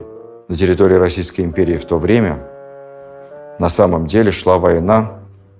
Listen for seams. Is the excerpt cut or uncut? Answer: uncut